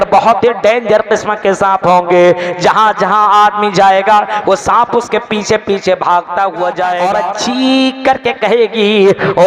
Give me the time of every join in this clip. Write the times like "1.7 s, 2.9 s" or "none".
7.0 s